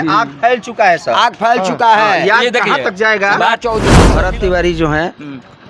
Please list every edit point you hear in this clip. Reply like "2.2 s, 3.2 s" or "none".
4.1 s